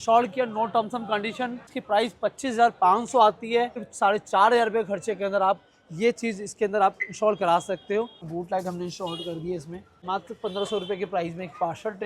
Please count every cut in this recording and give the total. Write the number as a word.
four